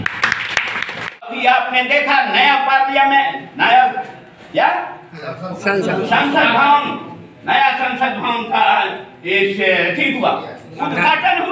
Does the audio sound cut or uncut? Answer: cut